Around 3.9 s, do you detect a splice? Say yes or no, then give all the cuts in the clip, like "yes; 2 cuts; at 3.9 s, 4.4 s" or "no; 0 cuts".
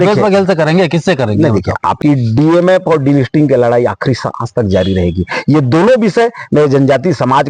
no; 1 cut; at 2.0 s